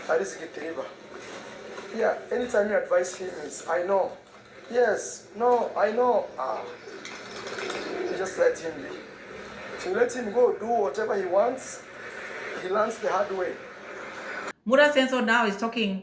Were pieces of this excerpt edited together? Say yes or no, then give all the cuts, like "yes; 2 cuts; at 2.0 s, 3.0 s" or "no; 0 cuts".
no; 0 cuts